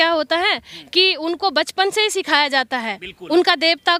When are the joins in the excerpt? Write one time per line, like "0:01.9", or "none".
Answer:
none